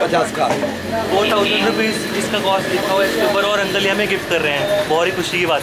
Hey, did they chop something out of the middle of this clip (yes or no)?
no